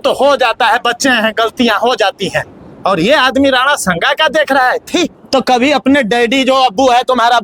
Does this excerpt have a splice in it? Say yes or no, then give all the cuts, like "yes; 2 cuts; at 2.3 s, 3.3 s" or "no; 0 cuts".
yes; 1 cut; at 5.2 s